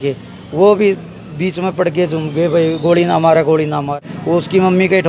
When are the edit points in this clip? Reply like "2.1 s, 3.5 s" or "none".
4.0 s